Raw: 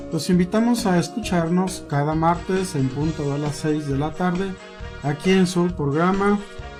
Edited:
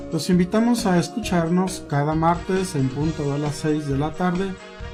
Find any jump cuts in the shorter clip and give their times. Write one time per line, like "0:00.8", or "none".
none